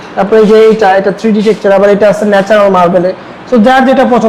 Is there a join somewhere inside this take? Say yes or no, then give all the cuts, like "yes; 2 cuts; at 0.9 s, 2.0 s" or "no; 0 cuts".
no; 0 cuts